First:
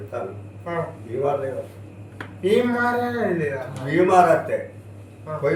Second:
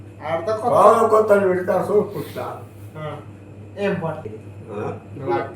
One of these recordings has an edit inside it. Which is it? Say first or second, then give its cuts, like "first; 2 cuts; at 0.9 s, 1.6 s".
second; 1 cut; at 4.3 s